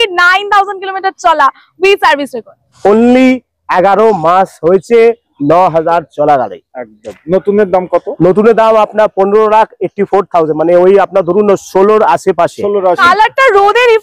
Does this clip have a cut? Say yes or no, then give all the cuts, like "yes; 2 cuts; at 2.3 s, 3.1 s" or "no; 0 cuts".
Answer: yes; 2 cuts; at 2.7 s, 13.0 s